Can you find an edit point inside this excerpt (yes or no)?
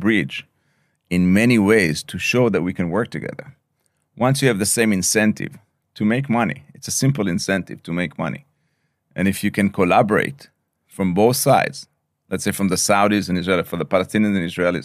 no